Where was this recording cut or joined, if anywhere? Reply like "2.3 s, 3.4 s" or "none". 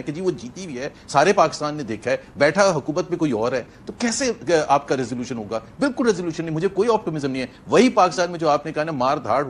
none